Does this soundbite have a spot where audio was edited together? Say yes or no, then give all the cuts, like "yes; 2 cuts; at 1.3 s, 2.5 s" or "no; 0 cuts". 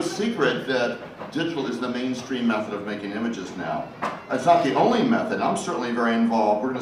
yes; 1 cut; at 5.7 s